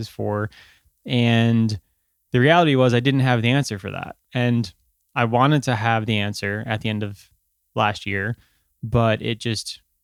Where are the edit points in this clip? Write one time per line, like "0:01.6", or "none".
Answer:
none